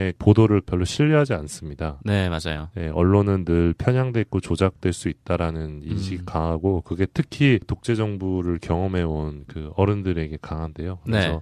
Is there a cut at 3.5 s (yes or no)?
yes